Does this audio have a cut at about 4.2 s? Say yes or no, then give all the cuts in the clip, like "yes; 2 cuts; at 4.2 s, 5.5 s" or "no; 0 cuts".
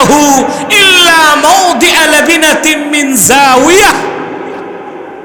no; 0 cuts